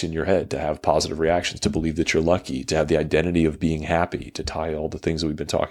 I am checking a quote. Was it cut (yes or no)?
no